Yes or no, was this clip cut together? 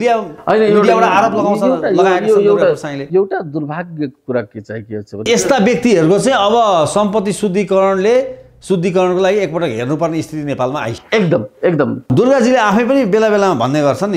yes